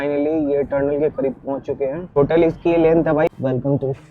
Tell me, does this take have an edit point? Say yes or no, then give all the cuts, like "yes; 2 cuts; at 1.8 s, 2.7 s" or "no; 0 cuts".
yes; 2 cuts; at 2.2 s, 3.3 s